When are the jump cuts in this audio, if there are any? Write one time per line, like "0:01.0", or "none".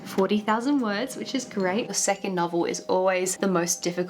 0:01.9